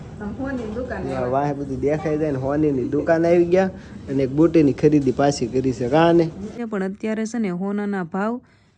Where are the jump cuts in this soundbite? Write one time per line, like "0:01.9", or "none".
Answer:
0:06.6